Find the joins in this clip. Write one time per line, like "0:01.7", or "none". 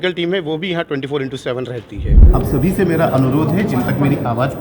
0:02.2